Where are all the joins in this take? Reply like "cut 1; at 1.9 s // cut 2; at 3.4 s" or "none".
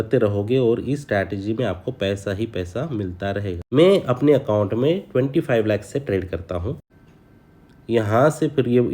cut 1; at 3.6 s // cut 2; at 6.9 s

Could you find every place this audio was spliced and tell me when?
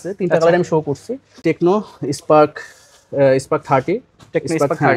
cut 1; at 1.4 s

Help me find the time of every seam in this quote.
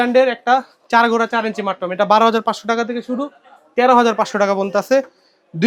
none

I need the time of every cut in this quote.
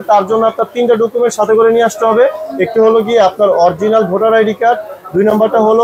none

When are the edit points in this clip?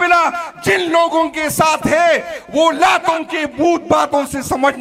none

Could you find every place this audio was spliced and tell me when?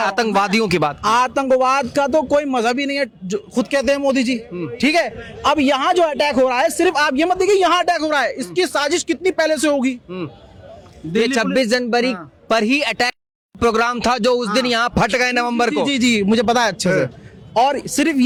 none

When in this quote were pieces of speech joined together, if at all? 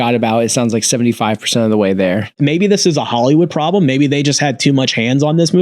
cut 1; at 2.4 s

